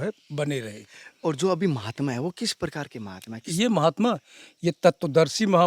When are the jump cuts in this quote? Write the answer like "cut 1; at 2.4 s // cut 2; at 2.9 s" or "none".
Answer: none